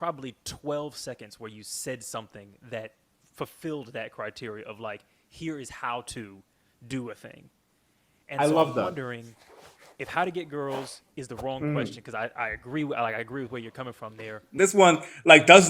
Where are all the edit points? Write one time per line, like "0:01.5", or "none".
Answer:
0:14.5

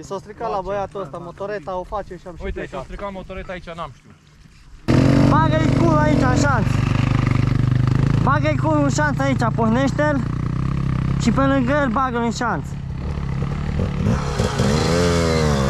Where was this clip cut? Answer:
0:04.9

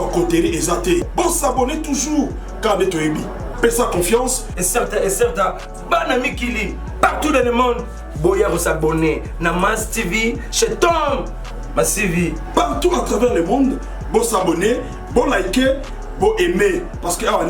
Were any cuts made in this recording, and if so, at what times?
none

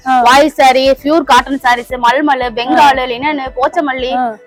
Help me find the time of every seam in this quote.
none

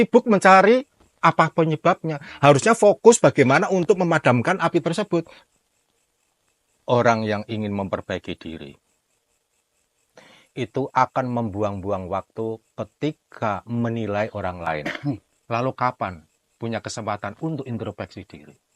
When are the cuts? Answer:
0:05.4
0:15.3

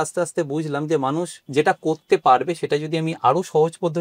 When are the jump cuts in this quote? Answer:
0:01.5

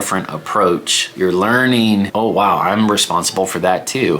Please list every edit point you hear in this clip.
0:01.0
0:02.1

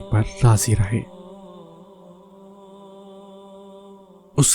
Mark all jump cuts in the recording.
0:01.0
0:03.6

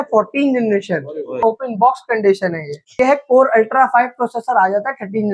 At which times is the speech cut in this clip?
0:01.4
0:03.0

